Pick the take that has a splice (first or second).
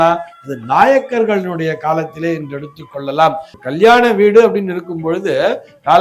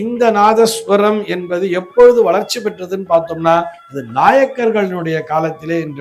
first